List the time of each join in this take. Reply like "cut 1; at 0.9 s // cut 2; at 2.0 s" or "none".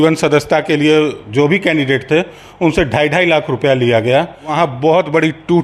cut 1; at 4.5 s